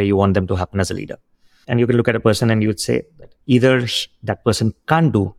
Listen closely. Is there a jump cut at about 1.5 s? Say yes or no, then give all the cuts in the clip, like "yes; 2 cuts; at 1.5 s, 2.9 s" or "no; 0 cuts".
yes; 1 cut; at 1.5 s